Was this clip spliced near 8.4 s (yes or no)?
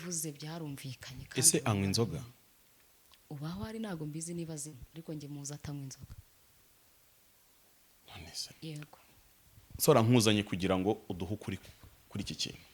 yes